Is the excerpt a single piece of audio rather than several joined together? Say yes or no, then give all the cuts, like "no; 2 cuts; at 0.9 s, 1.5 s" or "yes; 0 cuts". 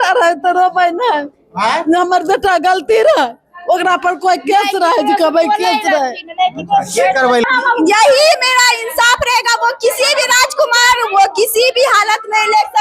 no; 1 cut; at 7.5 s